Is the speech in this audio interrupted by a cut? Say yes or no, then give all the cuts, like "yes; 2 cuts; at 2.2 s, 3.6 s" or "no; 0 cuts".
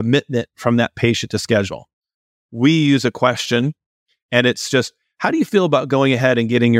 yes; 2 cuts; at 2.3 s, 4.0 s